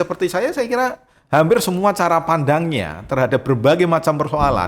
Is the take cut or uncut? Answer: uncut